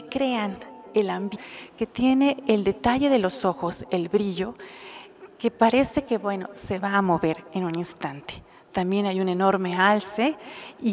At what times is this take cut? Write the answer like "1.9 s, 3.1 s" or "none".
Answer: none

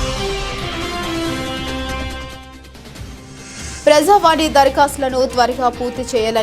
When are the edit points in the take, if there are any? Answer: 3.7 s

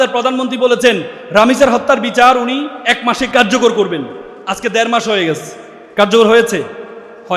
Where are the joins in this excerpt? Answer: 1.1 s, 3.3 s

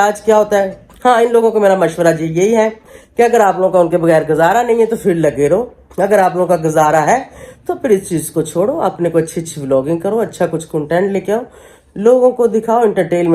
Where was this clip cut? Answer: none

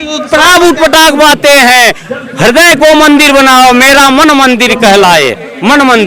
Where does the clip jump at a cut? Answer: none

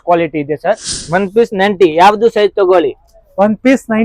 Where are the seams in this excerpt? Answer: 0.9 s

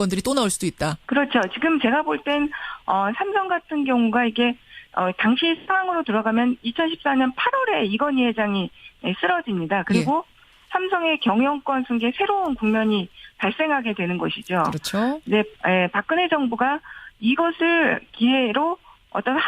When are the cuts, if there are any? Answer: 5.5 s

